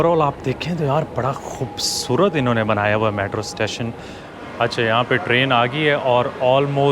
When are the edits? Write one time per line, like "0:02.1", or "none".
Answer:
0:04.3